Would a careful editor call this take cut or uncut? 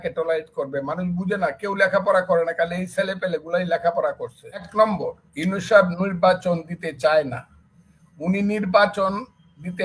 cut